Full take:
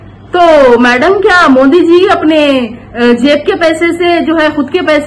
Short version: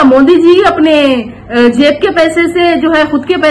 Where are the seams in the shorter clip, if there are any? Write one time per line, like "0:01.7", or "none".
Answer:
none